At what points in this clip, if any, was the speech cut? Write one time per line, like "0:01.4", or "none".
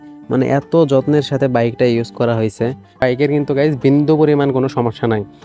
0:03.0